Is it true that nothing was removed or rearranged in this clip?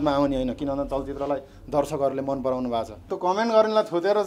no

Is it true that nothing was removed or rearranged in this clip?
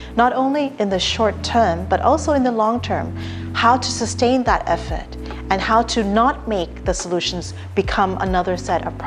yes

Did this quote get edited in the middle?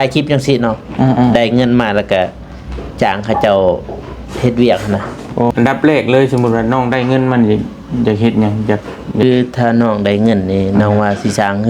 yes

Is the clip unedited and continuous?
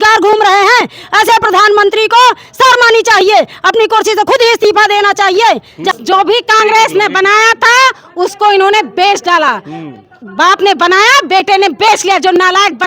no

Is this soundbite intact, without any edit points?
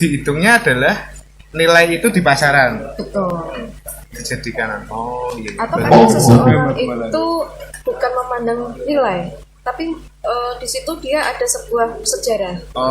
yes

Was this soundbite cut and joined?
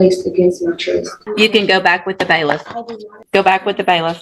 yes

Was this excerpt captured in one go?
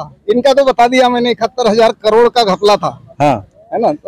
yes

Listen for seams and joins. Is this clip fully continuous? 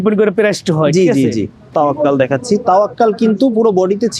no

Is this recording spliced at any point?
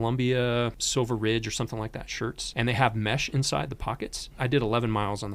yes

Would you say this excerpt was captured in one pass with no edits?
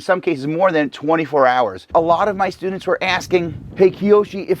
no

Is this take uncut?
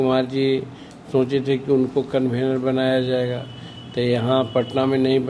yes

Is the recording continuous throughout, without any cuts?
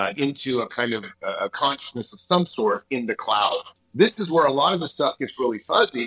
no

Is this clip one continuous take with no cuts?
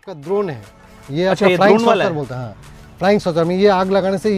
yes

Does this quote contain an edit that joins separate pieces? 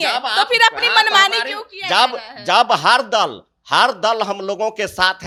no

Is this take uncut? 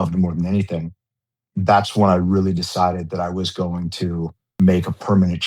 no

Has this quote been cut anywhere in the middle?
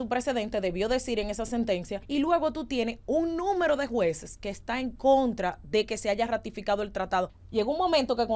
yes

